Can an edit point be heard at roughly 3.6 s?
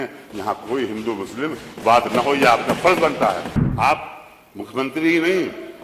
yes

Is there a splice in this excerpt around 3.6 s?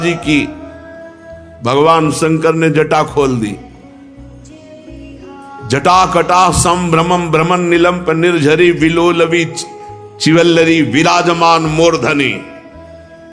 no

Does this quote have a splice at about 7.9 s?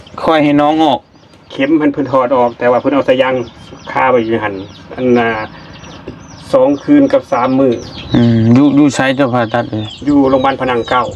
yes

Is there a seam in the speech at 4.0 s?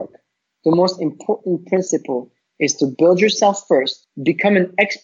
yes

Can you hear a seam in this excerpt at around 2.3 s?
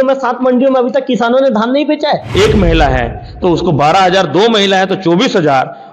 yes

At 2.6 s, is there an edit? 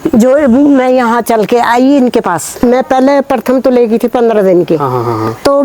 yes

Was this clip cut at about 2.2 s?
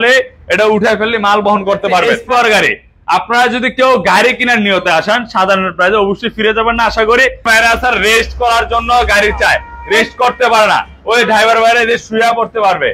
yes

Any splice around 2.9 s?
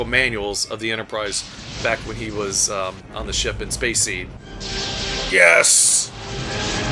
no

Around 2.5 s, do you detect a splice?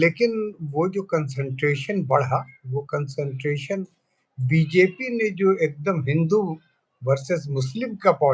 no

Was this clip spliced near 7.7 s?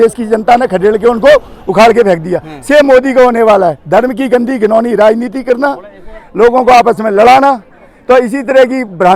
no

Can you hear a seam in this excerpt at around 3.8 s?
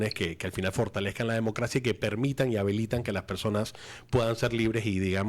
no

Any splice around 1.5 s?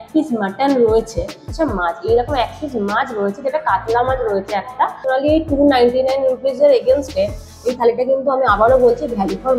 yes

